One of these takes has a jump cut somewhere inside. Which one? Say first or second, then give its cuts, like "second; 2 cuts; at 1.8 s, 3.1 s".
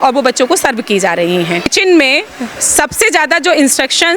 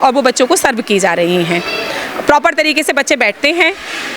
first; 1 cut; at 1.7 s